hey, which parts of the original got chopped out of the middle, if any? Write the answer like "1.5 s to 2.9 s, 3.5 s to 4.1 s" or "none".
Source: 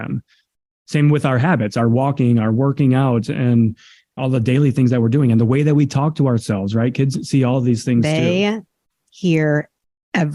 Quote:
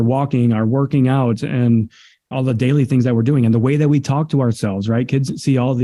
none